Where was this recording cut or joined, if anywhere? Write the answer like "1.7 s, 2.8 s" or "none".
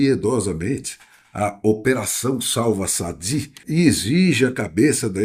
3.6 s